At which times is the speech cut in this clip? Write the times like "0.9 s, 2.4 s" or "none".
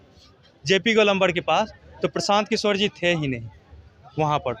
none